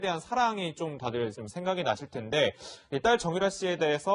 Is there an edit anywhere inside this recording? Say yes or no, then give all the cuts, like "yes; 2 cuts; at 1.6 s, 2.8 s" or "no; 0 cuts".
yes; 1 cut; at 2.0 s